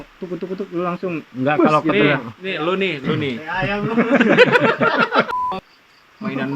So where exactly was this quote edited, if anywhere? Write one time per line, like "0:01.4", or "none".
0:05.4